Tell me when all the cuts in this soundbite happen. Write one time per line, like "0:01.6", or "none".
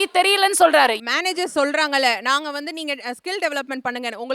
0:01.0